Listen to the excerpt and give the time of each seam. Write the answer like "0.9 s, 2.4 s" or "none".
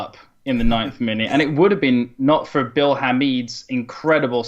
3.2 s